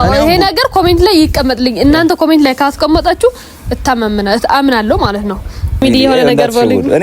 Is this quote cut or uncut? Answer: cut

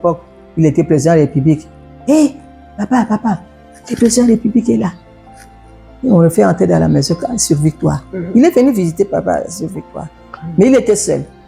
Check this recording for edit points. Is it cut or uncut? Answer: uncut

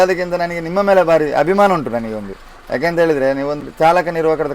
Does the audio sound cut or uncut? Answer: cut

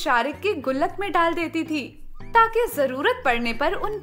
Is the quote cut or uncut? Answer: uncut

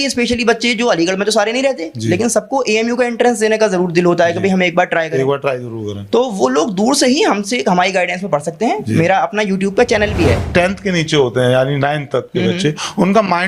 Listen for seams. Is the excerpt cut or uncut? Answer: cut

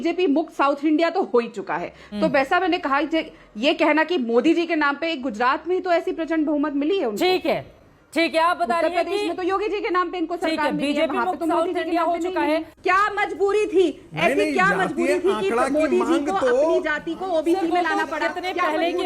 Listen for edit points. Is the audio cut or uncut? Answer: uncut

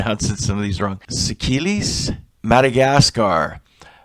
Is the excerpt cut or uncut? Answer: cut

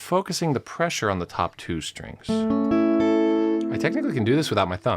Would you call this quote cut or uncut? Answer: cut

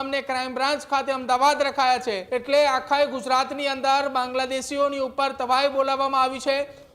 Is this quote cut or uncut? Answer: cut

